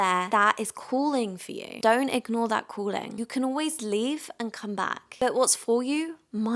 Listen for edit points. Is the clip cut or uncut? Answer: uncut